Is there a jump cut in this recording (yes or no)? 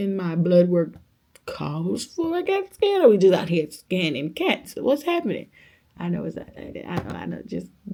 no